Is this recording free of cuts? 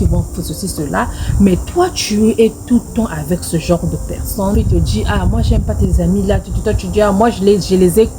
no; 1 cut; at 4.5 s

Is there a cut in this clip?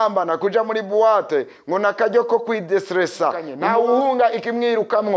yes; 1 cut; at 3.5 s

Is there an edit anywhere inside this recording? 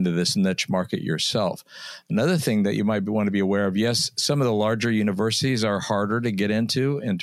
no; 0 cuts

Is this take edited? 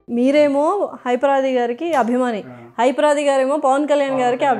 no; 0 cuts

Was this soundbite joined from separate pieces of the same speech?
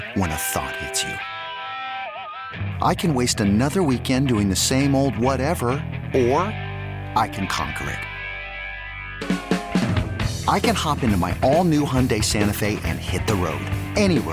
no; 0 cuts

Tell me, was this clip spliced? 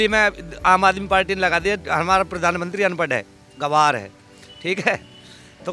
no; 0 cuts

